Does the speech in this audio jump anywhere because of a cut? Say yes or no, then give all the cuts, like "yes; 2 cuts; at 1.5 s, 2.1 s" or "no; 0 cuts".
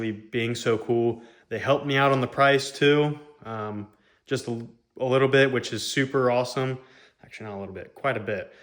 no; 0 cuts